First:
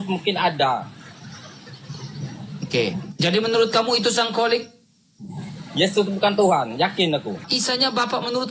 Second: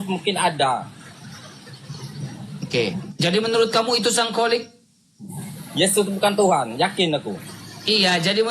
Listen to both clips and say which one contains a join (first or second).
first